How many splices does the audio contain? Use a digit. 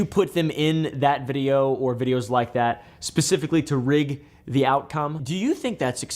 1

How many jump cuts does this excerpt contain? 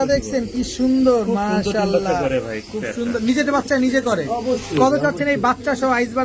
0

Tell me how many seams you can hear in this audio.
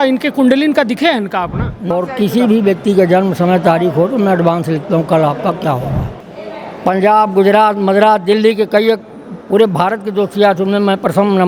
2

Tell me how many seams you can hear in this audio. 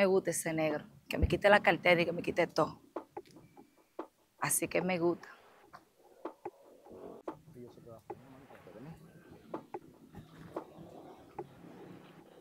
0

